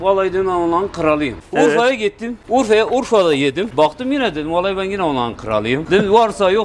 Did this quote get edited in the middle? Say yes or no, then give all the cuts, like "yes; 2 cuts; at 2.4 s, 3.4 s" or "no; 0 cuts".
yes; 4 cuts; at 1.4 s, 2.3 s, 3.7 s, 5.8 s